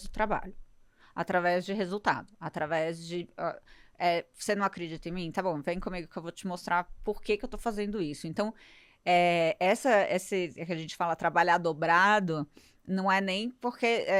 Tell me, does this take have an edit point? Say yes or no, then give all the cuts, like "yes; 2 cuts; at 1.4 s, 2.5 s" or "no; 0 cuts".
no; 0 cuts